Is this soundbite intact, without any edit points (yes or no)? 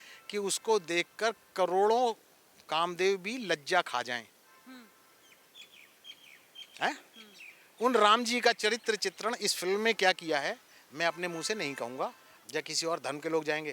no